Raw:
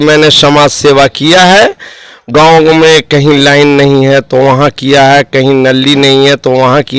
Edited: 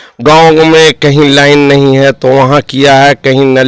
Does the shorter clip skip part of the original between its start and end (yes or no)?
no